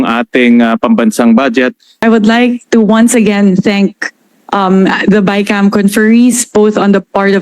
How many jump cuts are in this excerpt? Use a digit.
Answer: 1